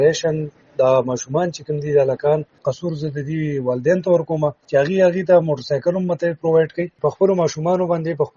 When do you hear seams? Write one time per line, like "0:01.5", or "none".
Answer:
0:02.6
0:04.6
0:06.9